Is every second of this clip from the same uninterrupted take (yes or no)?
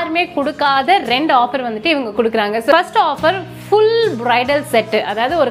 no